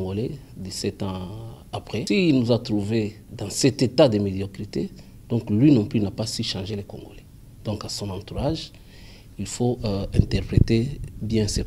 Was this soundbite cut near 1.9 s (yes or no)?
yes